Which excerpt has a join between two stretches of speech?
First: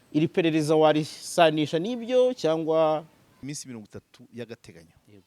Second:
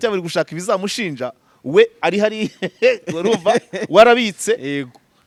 first; 1 cut; at 3.5 s

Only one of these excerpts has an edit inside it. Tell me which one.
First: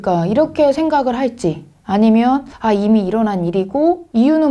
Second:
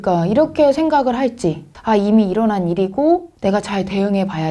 second; 2 cuts; at 1.7 s, 3.3 s

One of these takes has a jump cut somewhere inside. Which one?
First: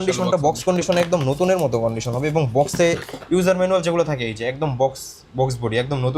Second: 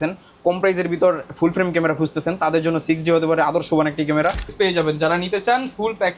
second; 1 cut; at 4.5 s

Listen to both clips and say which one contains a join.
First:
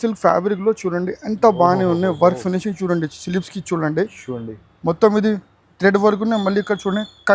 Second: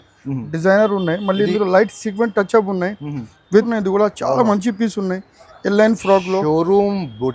second; 1 cut; at 3.7 s

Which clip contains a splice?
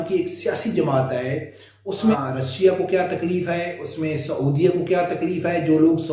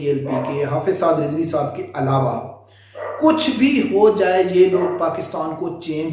first; 1 cut; at 2.2 s

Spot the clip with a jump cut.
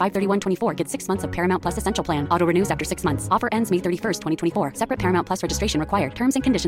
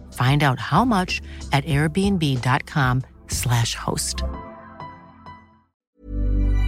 second; 1 cut; at 5.7 s

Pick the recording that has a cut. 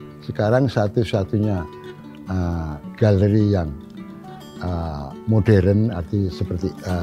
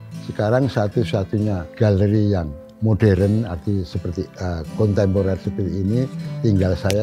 second; 2 cuts; at 1.7 s, 2.6 s

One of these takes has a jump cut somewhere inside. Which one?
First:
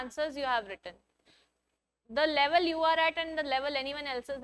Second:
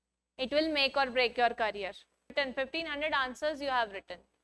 second; 1 cut; at 2.3 s

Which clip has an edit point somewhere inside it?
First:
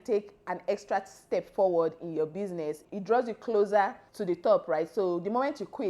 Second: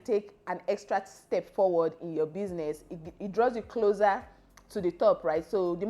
first; 2 cuts; at 2.9 s, 4.1 s

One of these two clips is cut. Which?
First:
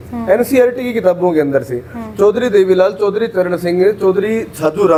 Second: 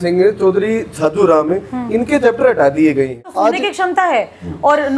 second; 1 cut; at 3.3 s

